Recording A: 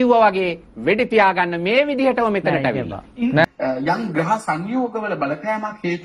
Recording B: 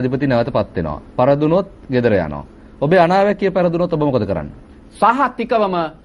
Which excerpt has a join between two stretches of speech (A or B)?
A